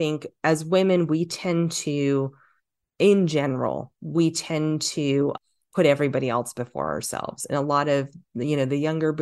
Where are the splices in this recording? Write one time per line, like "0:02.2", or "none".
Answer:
0:05.4